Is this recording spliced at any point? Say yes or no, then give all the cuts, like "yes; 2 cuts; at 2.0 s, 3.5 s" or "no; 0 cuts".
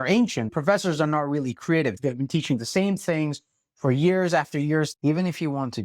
yes; 2 cuts; at 2.0 s, 4.9 s